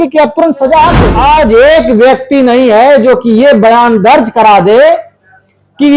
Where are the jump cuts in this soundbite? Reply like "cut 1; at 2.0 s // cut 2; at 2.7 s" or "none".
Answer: cut 1; at 1.1 s